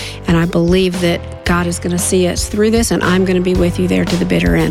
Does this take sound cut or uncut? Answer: cut